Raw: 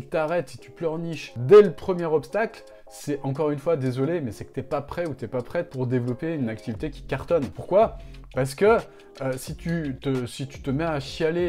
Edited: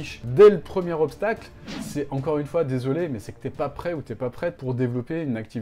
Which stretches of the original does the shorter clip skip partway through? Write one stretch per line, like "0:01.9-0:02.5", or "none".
none